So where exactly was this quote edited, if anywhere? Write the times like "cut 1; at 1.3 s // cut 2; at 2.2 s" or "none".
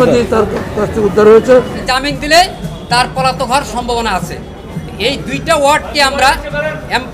cut 1; at 1.8 s